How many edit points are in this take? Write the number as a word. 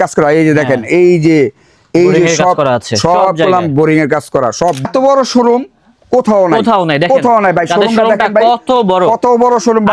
one